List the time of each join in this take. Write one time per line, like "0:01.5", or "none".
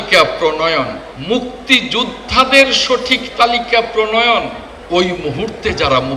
0:01.1
0:04.7